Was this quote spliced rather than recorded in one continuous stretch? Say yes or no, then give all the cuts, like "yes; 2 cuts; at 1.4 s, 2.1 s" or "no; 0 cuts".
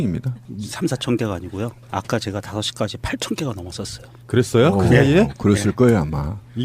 yes; 1 cut; at 1.2 s